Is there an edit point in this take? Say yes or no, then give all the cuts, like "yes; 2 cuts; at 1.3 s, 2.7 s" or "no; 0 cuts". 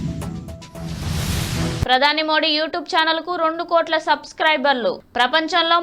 yes; 1 cut; at 1.3 s